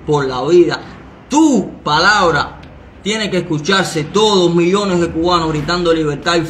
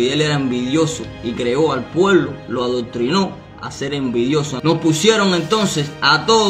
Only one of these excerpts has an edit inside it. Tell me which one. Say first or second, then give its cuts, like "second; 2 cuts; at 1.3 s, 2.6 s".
second; 1 cut; at 4.5 s